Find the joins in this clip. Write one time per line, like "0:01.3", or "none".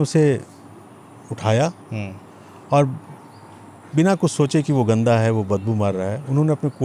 none